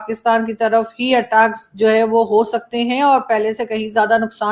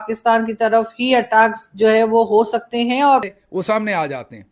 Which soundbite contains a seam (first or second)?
second